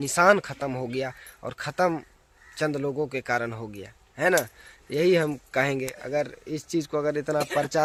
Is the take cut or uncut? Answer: uncut